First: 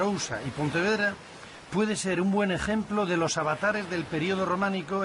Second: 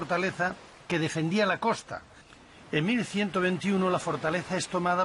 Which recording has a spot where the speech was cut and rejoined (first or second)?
second